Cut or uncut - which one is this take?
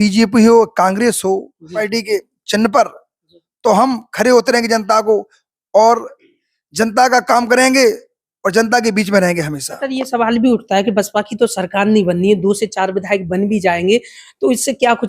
cut